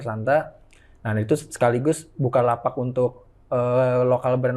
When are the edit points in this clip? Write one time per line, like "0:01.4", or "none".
none